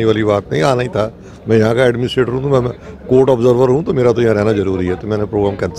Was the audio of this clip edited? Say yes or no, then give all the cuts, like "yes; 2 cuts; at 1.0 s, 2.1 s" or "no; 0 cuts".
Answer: no; 0 cuts